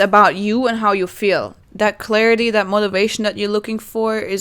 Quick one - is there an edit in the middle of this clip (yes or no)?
yes